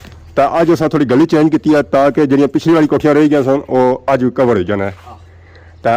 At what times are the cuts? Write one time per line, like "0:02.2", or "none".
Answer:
none